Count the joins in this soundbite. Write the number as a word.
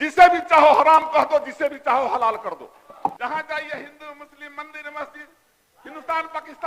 one